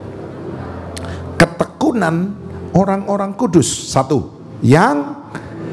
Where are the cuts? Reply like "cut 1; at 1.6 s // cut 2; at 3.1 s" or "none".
none